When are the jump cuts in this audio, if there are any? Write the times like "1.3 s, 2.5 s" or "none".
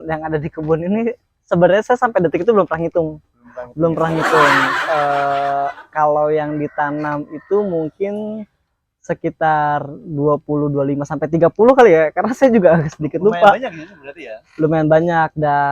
none